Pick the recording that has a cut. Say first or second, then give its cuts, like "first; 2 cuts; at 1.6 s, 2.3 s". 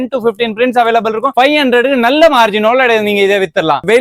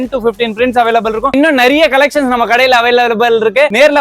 second; 1 cut; at 1.3 s